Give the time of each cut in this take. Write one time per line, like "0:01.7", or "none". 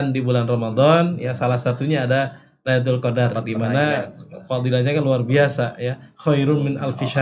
none

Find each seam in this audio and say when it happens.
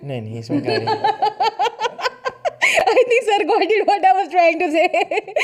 none

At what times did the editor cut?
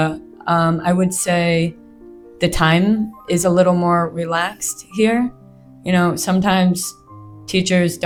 none

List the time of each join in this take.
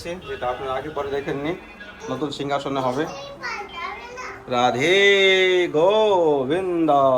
none

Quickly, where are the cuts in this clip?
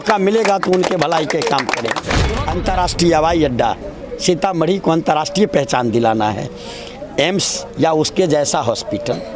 0:02.2

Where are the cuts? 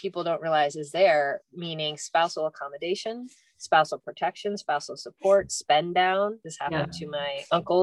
none

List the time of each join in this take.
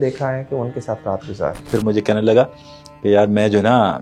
0:01.7

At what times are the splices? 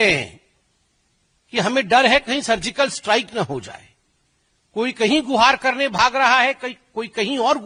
none

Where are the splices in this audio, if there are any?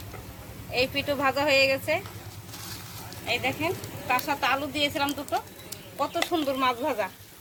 none

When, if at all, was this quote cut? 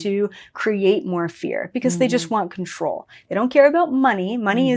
none

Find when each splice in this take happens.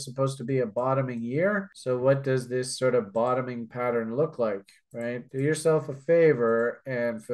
none

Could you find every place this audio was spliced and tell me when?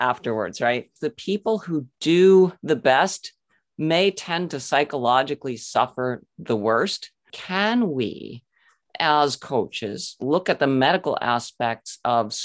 0:01.1
0:02.6
0:07.4

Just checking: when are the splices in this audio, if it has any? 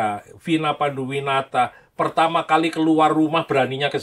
none

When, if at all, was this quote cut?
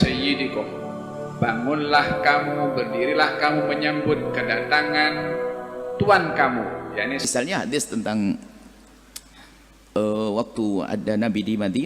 0:07.3

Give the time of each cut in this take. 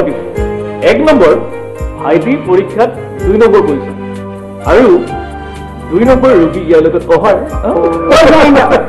none

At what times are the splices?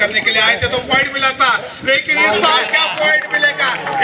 none

